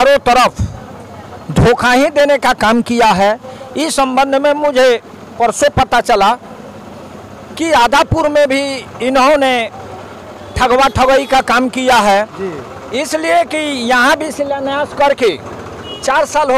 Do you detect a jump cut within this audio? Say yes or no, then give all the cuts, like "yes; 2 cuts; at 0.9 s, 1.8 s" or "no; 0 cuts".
no; 0 cuts